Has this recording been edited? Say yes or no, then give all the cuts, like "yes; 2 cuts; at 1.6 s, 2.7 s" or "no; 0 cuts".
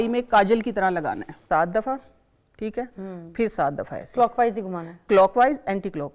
yes; 1 cut; at 1.3 s